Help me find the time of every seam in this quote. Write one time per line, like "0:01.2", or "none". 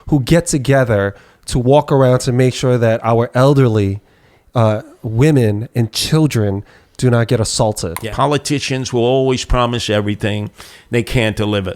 0:08.0